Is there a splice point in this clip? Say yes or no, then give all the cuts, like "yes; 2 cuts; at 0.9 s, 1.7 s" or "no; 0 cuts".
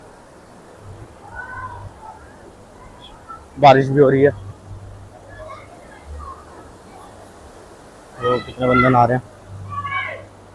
no; 0 cuts